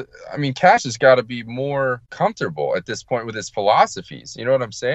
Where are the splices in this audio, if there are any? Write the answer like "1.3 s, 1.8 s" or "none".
2.1 s